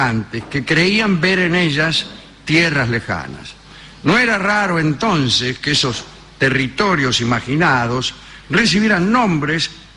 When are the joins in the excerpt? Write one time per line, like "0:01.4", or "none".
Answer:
0:08.4